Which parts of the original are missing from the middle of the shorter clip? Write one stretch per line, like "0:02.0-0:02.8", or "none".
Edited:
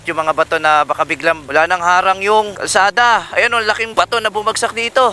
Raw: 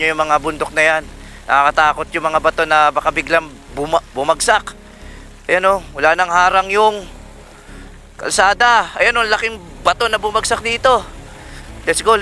0:03.5-0:05.9
0:07.1-0:08.2
0:09.5-0:09.7